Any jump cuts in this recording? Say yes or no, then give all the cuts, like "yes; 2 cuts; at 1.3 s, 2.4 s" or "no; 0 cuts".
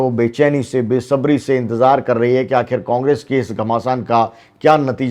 no; 0 cuts